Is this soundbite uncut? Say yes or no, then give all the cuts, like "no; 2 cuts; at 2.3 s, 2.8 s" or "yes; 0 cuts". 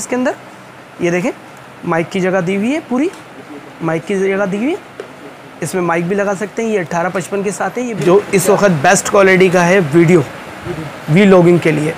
no; 1 cut; at 7.9 s